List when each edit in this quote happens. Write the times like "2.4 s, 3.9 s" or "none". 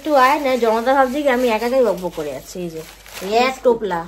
none